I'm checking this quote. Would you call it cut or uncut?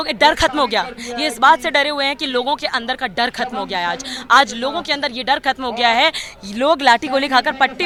uncut